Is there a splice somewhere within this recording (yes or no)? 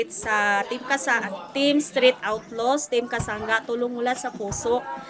no